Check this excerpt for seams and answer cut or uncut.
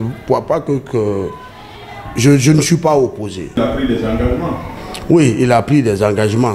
cut